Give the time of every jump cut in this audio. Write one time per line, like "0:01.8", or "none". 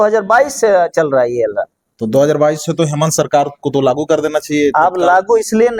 none